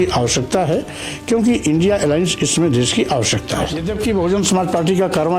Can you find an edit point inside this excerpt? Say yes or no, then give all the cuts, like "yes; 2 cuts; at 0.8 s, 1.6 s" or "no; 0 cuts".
yes; 1 cut; at 3.8 s